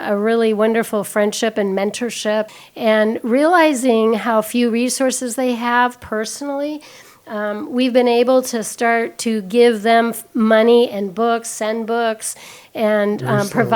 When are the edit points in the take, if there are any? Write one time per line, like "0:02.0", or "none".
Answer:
0:02.6